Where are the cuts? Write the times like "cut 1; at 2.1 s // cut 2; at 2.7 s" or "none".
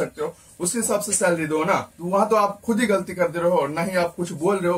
cut 1; at 1.9 s